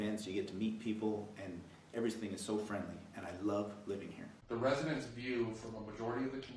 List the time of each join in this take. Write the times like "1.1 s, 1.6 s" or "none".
none